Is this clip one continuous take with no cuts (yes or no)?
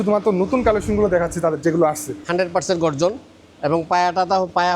no